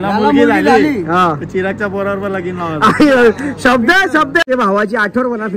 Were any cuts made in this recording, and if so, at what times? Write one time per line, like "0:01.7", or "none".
0:04.4